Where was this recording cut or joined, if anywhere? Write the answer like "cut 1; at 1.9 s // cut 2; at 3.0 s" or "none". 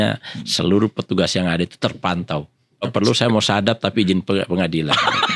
cut 1; at 2.9 s